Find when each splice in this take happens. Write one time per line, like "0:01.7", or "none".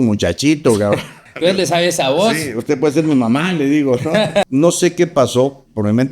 0:04.5